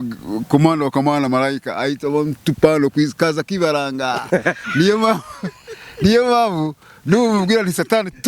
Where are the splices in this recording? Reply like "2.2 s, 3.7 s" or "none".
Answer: none